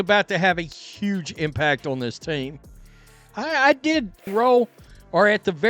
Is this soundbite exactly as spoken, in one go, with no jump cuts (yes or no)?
no